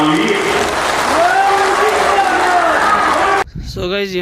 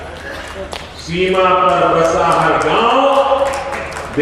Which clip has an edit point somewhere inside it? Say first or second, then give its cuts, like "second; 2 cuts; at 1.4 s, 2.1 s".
first; 2 cuts; at 1.5 s, 3.4 s